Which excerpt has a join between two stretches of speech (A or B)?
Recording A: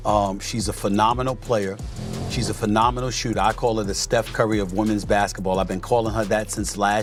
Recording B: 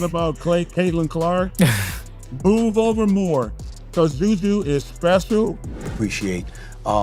B